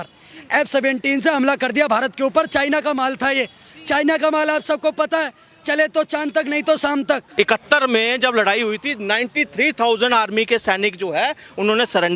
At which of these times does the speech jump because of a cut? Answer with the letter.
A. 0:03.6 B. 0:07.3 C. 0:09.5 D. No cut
B